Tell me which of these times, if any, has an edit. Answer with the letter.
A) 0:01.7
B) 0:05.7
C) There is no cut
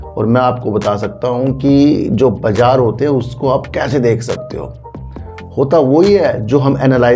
C